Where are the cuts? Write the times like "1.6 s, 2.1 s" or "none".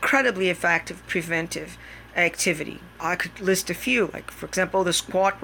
3.0 s